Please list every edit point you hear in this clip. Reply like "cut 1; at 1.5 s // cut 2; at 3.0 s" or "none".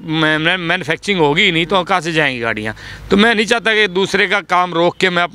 none